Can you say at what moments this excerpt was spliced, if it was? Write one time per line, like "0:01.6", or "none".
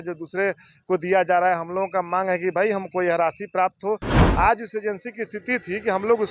0:04.2